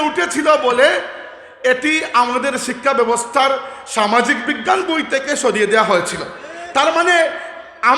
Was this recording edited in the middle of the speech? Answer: no; 0 cuts

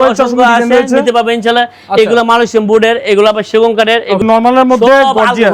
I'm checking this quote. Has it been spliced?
yes; 1 cut; at 4.2 s

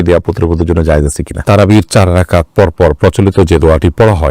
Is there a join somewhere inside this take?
yes; 1 cut; at 1.4 s

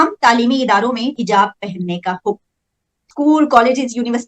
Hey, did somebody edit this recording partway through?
yes; 1 cut; at 1.2 s

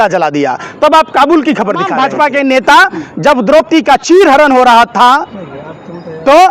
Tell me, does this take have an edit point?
yes; 1 cut; at 1.9 s

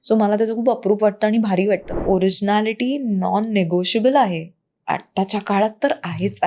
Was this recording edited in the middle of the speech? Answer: yes; 1 cut; at 1.9 s

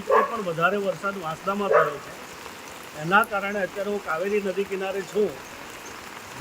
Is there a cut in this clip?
no; 0 cuts

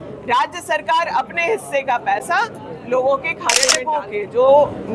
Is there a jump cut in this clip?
yes; 1 cut; at 3.8 s

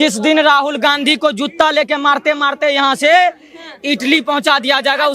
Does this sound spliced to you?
no; 0 cuts

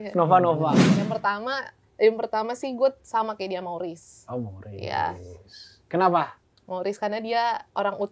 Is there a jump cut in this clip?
yes; 1 cut; at 0.9 s

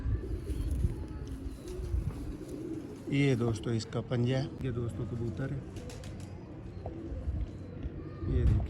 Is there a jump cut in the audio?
yes; 1 cut; at 4.6 s

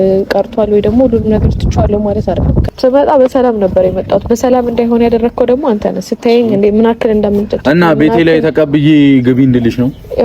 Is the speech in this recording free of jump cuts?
no; 1 cut; at 2.6 s

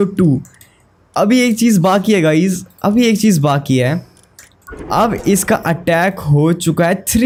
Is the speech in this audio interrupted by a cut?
no; 0 cuts

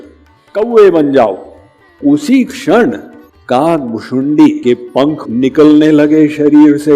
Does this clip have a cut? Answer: yes; 1 cut; at 1.9 s

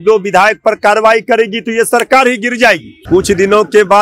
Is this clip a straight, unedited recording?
no; 1 cut; at 2.9 s

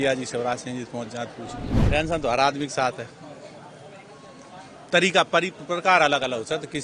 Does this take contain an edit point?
yes; 1 cut; at 1.7 s

